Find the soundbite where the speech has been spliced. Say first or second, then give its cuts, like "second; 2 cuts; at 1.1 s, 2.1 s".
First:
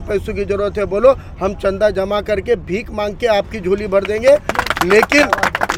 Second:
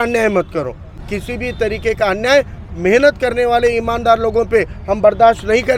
second; 1 cut; at 1.0 s